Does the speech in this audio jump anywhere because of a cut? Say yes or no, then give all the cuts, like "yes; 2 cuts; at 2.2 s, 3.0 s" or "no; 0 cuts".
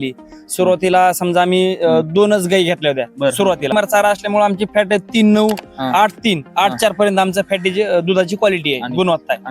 yes; 1 cut; at 3.7 s